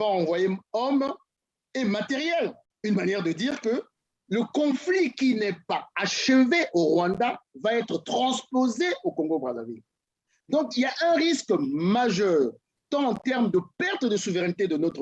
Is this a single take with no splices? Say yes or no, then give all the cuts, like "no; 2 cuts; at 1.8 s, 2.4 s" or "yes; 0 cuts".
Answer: yes; 0 cuts